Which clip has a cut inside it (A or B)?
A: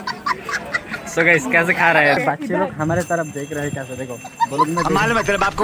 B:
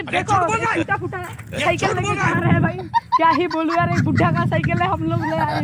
A